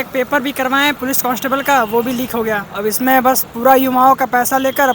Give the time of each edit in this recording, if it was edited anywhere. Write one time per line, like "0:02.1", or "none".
0:01.0
0:02.7